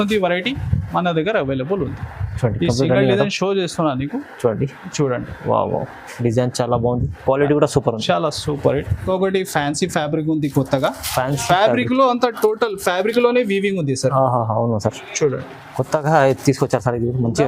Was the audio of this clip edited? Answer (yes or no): yes